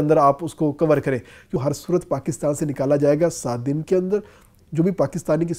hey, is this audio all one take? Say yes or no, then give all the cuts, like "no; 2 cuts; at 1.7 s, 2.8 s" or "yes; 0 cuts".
no; 2 cuts; at 1.6 s, 4.6 s